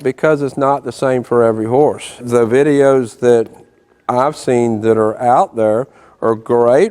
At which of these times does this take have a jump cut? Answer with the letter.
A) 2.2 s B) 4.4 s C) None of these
A